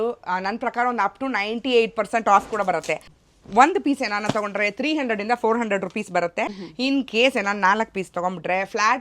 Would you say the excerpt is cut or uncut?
cut